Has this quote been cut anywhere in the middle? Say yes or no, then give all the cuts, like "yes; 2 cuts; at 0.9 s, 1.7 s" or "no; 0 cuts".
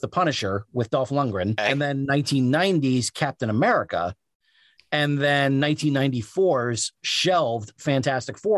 yes; 1 cut; at 1.6 s